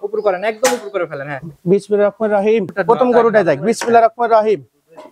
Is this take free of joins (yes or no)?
no